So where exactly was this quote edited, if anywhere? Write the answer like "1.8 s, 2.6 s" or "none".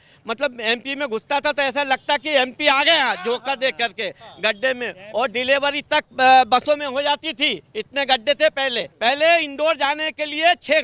8.9 s